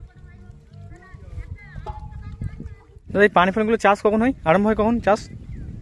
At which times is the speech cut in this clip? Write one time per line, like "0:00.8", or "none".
0:03.0